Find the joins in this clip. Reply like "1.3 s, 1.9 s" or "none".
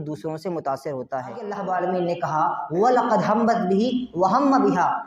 1.5 s